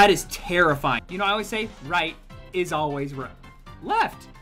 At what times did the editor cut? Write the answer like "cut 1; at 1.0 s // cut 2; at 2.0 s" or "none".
cut 1; at 1.1 s